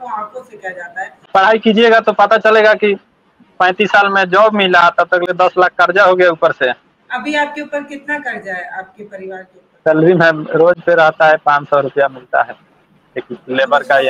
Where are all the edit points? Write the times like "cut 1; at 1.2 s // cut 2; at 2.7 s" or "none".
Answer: cut 1; at 1.2 s // cut 2; at 6.9 s // cut 3; at 9.6 s